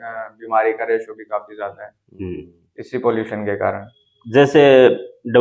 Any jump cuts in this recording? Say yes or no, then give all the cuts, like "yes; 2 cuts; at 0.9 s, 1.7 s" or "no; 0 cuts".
no; 0 cuts